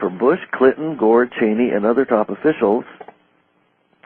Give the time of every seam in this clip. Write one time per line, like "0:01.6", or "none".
0:02.7